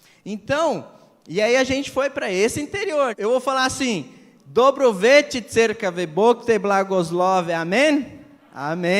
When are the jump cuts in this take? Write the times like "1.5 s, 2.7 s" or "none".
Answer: 3.1 s